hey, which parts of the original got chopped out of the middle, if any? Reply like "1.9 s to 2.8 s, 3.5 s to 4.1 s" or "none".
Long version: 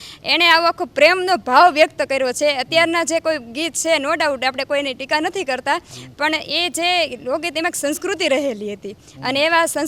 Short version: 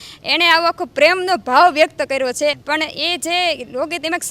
2.6 s to 6.1 s